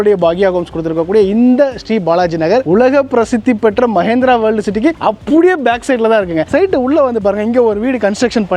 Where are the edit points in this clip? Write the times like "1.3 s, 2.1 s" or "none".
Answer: 2.7 s, 6.5 s